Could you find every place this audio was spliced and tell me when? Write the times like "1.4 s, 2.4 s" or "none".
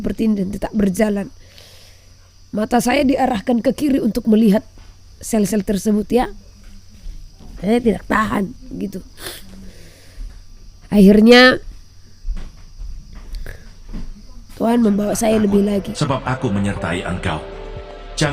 15.9 s